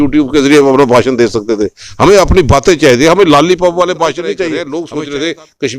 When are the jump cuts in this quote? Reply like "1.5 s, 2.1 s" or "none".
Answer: 4.8 s